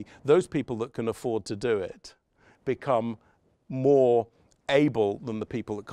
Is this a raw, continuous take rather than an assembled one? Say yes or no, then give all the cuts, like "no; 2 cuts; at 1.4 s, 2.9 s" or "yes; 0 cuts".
yes; 0 cuts